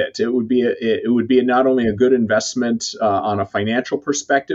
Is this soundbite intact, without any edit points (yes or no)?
yes